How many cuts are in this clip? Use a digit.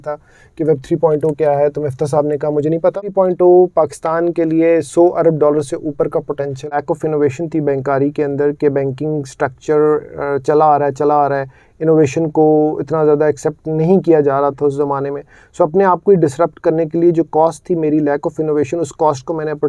2